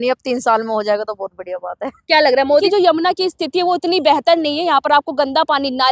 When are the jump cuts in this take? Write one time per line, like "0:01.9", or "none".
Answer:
0:02.6